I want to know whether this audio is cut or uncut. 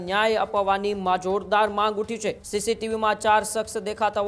cut